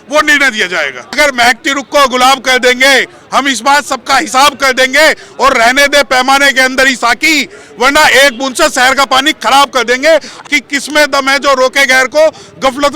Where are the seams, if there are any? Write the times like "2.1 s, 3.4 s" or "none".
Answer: 1.2 s, 10.4 s